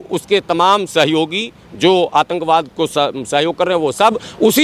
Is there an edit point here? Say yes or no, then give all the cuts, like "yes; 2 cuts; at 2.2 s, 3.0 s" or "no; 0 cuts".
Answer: no; 0 cuts